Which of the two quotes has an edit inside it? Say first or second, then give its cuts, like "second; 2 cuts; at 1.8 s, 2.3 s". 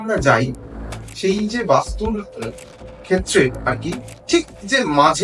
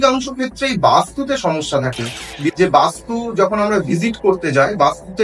second; 1 cut; at 2.5 s